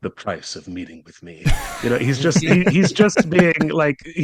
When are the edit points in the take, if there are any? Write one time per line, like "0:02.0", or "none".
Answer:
none